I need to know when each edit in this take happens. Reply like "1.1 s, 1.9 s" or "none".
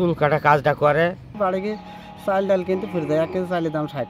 1.3 s